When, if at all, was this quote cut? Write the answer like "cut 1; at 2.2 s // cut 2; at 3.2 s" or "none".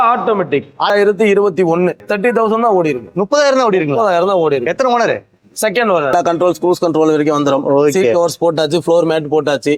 cut 1; at 0.9 s // cut 2; at 2.0 s // cut 3; at 6.1 s